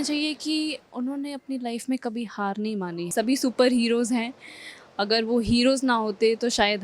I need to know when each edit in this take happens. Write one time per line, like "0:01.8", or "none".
0:03.1